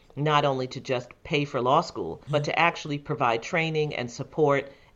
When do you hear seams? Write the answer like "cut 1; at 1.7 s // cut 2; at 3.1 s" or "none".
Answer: cut 1; at 2.2 s